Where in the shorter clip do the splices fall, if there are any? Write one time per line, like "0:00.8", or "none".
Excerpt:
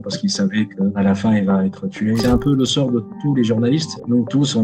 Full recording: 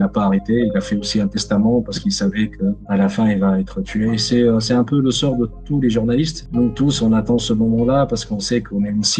0:00.9
0:02.2